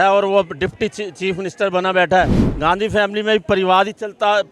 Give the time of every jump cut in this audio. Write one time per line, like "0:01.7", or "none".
0:02.4

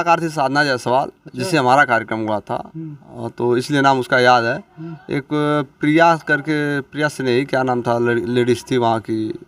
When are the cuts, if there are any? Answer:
none

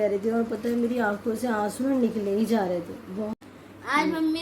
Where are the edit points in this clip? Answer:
0:03.3

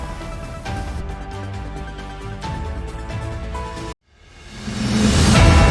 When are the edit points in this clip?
none

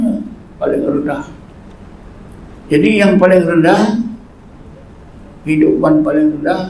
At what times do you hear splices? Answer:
none

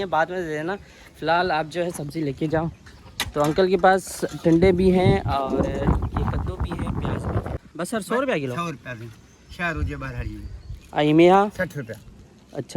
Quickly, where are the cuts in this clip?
0:07.6

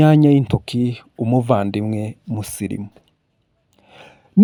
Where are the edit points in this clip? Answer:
none

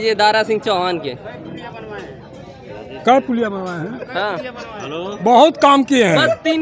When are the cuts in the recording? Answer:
none

